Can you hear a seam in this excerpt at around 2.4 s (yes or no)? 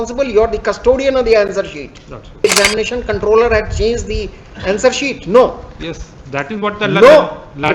yes